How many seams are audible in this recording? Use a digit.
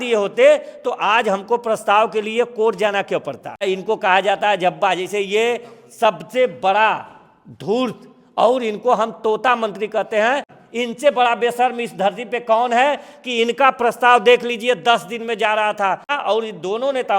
3